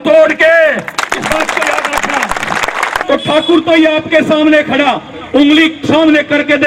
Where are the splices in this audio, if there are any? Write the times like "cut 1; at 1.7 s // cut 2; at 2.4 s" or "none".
cut 1; at 3.0 s